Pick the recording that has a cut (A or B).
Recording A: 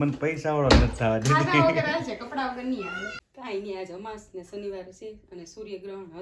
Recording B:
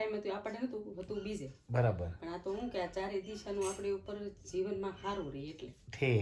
A